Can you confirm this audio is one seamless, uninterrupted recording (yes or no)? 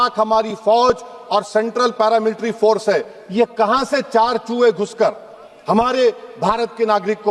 yes